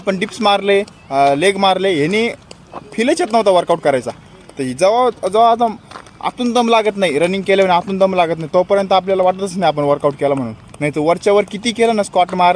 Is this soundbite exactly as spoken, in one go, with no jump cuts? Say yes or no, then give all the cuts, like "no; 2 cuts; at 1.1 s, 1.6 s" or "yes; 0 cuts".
yes; 0 cuts